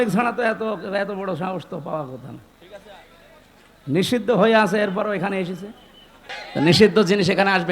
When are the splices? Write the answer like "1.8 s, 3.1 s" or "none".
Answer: 6.4 s